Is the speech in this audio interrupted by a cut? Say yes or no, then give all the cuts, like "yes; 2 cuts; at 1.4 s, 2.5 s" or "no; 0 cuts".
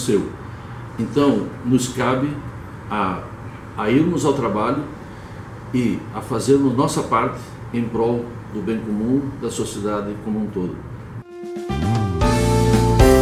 yes; 1 cut; at 11.3 s